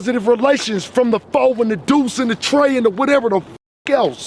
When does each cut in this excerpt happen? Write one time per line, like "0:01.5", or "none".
none